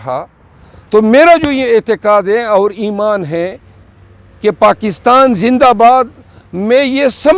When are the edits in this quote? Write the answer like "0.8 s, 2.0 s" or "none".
none